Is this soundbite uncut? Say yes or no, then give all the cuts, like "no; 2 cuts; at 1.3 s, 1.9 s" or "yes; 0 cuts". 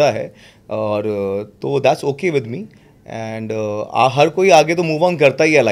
yes; 0 cuts